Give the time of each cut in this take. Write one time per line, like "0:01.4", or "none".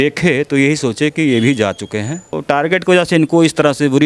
0:02.3